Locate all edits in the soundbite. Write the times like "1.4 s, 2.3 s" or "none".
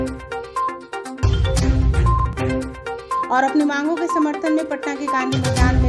1.2 s, 3.3 s

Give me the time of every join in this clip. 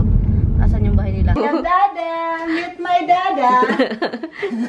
1.4 s

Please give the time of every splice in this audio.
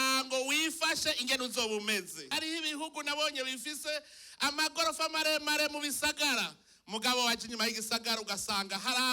2.3 s

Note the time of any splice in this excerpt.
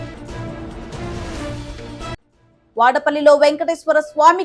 none

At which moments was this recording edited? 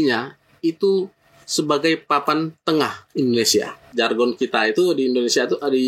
3.9 s

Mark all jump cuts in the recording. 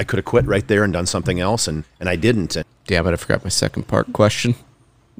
1.9 s, 2.6 s

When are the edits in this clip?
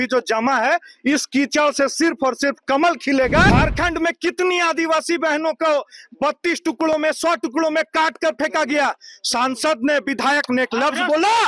3.5 s

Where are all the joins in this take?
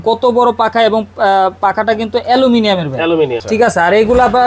3.4 s

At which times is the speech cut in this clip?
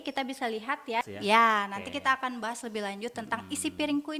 1.1 s

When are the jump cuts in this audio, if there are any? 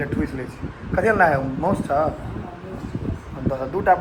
none

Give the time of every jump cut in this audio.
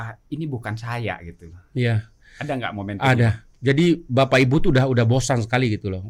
none

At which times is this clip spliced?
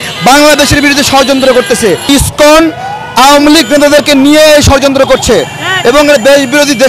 2.1 s

